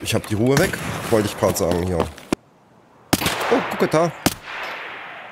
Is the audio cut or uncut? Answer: cut